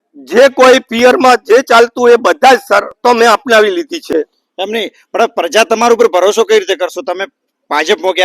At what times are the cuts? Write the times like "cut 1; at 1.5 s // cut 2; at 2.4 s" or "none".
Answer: cut 1; at 4.1 s